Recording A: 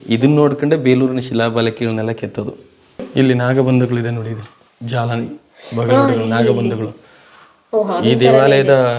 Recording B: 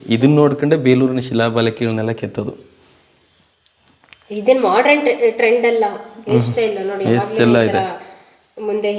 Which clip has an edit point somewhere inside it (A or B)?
A